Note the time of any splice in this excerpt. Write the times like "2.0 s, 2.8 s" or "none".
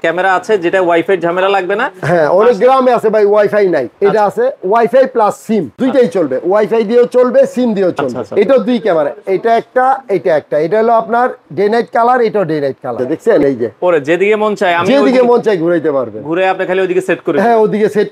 3.9 s, 5.7 s, 8.1 s, 13.2 s